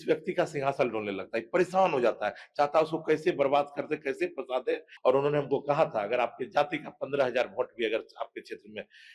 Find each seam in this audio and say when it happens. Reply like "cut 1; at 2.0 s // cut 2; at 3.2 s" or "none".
cut 1; at 4.9 s